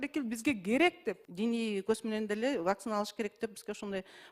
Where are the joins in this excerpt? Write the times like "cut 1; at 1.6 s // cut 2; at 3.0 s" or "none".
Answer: cut 1; at 1.3 s